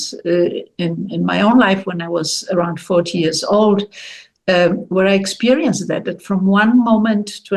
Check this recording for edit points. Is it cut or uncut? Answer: uncut